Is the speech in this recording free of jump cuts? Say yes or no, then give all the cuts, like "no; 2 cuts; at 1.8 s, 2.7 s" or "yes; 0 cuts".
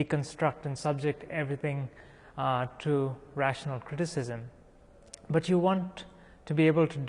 yes; 0 cuts